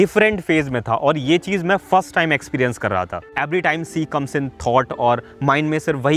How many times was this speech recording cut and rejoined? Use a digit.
0